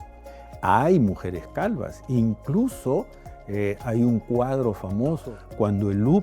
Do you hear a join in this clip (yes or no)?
yes